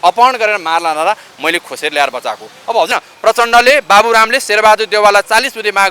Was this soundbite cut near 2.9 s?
yes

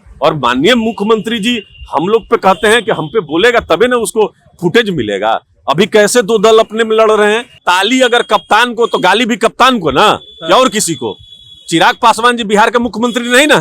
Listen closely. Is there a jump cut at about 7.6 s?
yes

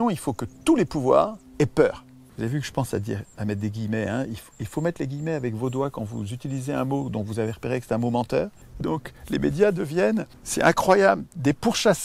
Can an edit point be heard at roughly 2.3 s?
yes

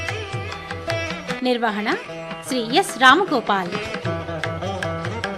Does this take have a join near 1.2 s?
yes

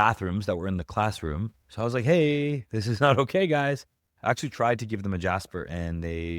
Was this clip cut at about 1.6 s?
yes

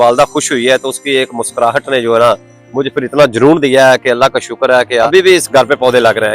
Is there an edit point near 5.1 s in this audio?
yes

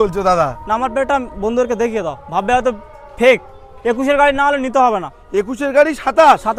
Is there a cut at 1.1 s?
no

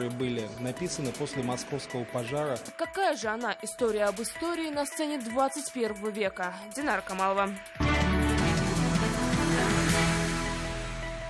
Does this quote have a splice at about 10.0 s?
no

